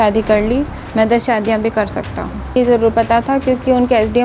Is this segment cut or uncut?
cut